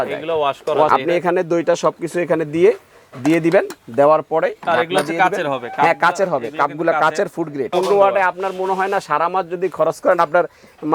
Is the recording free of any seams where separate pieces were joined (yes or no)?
no